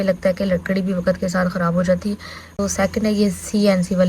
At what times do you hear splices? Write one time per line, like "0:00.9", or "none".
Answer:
0:02.6